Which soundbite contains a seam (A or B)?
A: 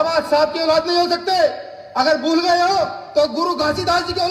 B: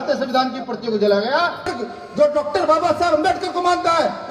B